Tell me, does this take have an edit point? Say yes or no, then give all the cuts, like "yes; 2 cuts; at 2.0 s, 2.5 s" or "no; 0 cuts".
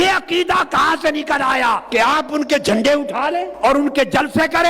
yes; 2 cuts; at 1.8 s, 3.5 s